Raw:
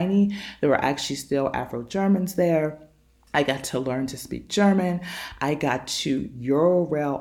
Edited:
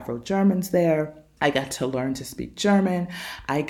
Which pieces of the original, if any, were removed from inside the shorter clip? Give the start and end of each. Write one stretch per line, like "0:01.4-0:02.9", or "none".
0:02.9-0:03.1